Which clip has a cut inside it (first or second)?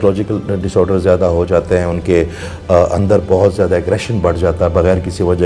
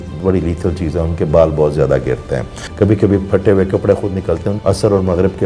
second